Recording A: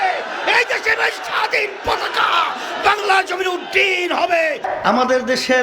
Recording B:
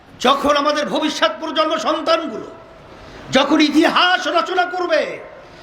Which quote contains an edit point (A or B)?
A